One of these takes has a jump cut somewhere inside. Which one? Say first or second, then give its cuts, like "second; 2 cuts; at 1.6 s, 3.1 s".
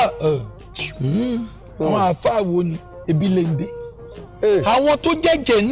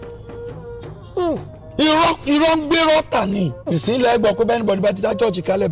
second; 1 cut; at 3.7 s